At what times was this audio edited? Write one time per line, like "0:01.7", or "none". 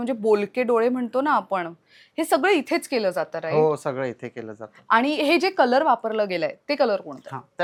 none